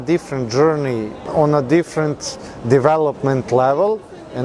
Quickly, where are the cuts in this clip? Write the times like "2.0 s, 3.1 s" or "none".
1.2 s